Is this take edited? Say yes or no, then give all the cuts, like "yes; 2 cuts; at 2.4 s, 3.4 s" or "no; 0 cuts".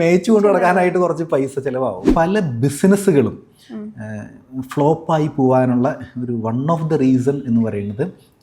yes; 1 cut; at 2.0 s